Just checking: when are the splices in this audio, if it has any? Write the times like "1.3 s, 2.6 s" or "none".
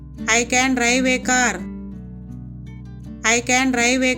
1.6 s, 3.2 s